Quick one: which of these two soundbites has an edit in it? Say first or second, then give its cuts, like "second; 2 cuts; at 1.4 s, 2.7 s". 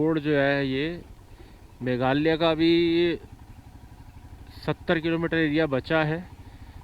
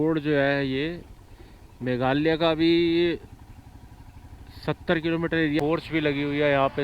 second; 1 cut; at 5.6 s